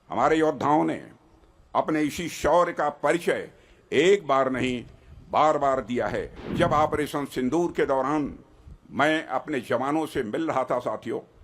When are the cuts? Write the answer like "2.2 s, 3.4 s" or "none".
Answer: 6.4 s